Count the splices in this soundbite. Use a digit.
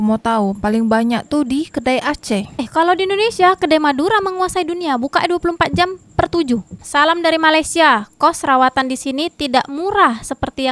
1